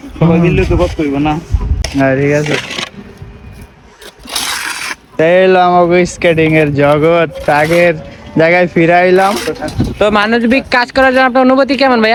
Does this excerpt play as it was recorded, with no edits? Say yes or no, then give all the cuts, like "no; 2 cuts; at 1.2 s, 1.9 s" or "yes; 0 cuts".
yes; 0 cuts